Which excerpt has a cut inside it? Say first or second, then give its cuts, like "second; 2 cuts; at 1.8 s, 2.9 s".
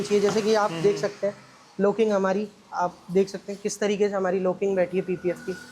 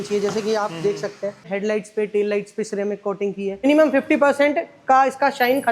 second; 2 cuts; at 1.5 s, 3.7 s